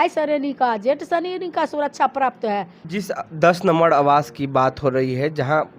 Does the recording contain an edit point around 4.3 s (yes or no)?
no